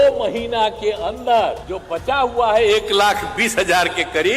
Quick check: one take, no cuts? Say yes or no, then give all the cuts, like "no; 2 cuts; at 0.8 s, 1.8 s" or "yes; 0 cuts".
no; 1 cut; at 1.7 s